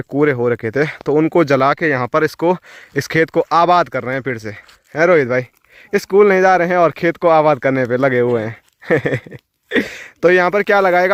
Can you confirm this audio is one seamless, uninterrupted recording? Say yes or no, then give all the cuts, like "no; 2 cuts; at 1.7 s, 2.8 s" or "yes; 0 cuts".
yes; 0 cuts